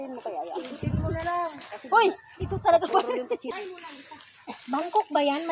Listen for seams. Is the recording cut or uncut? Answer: cut